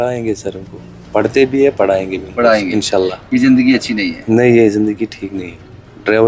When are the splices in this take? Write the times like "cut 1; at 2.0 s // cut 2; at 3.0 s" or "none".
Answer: none